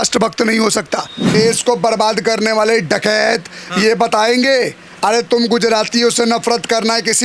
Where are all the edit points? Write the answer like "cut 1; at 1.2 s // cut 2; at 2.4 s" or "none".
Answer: cut 1; at 1.2 s